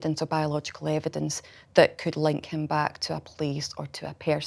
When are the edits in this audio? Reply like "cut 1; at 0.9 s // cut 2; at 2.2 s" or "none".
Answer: none